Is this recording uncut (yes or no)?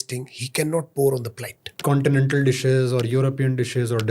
no